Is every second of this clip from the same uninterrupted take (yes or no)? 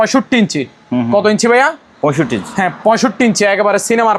yes